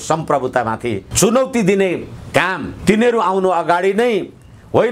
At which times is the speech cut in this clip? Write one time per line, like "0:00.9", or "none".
0:02.7